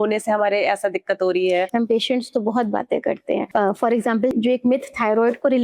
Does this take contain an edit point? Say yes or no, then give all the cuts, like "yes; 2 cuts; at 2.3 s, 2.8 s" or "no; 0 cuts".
yes; 3 cuts; at 1.7 s, 3.5 s, 4.3 s